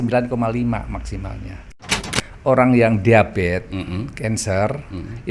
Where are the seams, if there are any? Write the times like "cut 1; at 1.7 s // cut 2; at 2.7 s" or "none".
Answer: cut 1; at 2.0 s